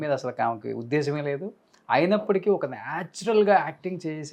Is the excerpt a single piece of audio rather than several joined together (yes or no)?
yes